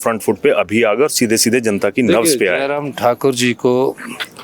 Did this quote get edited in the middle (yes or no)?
no